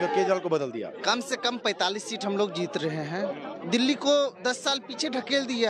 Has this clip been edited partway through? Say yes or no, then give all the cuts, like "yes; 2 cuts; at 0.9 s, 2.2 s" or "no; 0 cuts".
yes; 2 cuts; at 0.9 s, 3.5 s